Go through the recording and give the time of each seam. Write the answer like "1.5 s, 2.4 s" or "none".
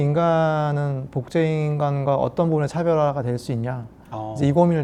none